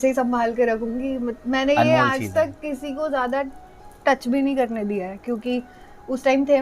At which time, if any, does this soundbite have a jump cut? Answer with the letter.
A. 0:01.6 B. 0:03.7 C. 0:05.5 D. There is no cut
D